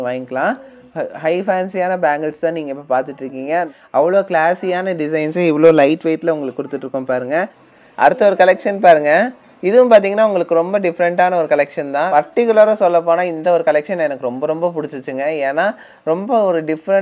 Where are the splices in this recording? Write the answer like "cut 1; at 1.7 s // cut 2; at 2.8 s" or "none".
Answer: cut 1; at 3.7 s // cut 2; at 7.6 s // cut 3; at 12.1 s